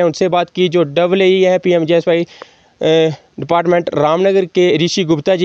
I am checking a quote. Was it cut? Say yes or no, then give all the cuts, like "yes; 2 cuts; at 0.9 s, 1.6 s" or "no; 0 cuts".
no; 0 cuts